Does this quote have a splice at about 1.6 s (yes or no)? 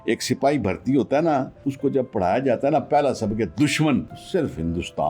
yes